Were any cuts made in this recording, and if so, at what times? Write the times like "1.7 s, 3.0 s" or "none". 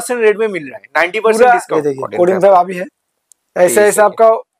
1.7 s